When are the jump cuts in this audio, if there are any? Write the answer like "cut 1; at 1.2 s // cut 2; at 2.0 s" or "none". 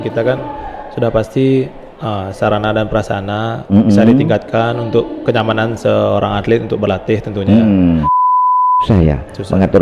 cut 1; at 8.3 s